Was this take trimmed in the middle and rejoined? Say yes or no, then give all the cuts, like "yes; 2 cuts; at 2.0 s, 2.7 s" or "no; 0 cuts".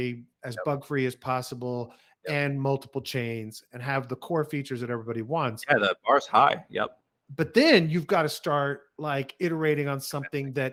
no; 0 cuts